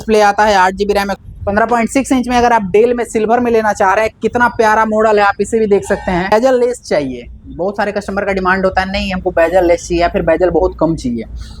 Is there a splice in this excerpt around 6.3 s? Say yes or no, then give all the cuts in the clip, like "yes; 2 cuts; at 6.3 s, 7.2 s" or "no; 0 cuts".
yes; 2 cuts; at 1.2 s, 6.3 s